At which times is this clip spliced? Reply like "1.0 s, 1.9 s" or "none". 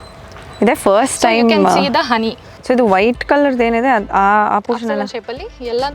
2.5 s

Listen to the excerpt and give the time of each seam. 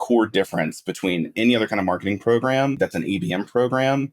2.7 s

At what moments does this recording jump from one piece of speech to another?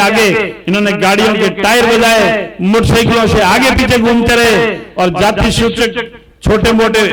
none

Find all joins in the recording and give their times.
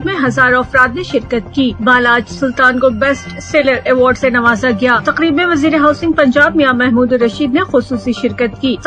none

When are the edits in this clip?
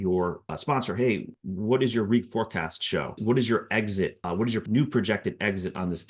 3.2 s, 4.6 s

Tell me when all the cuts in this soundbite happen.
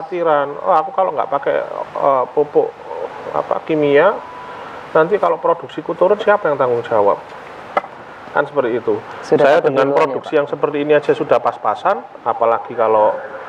none

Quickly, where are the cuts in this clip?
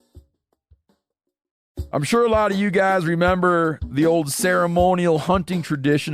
1.7 s

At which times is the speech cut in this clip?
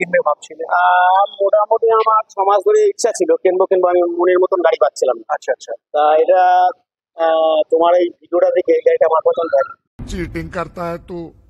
none

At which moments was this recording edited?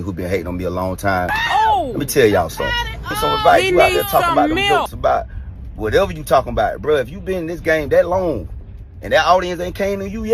3.1 s

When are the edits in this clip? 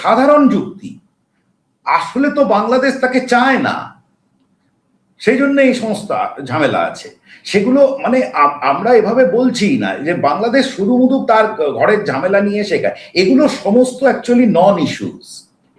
none

